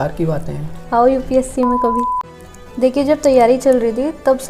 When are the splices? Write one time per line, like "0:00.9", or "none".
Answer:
0:02.2